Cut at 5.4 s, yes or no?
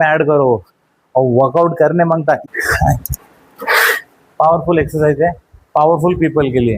no